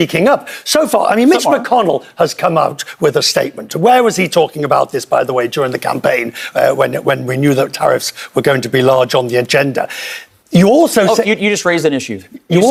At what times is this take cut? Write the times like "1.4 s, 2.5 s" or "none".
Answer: none

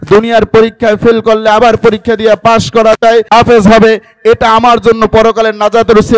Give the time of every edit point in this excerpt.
3.3 s

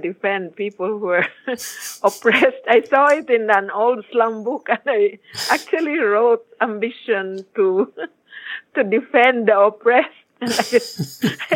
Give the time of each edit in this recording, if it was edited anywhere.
none

